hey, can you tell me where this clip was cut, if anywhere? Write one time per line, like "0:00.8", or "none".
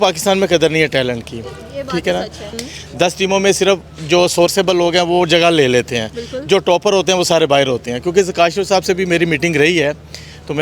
0:02.5